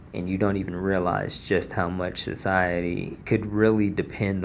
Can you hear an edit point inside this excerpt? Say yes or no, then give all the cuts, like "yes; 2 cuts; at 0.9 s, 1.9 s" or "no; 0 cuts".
yes; 1 cut; at 3.1 s